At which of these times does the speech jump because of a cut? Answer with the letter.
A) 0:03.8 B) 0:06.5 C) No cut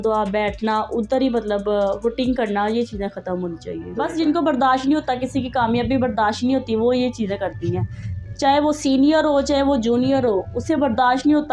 A